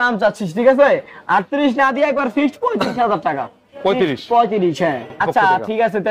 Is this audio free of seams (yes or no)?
no